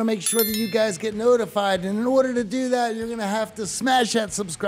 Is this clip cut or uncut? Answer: uncut